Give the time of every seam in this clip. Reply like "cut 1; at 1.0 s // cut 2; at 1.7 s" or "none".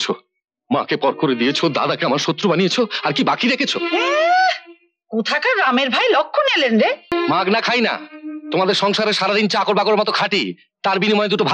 cut 1; at 7.1 s